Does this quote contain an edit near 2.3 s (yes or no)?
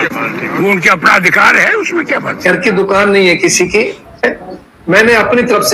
yes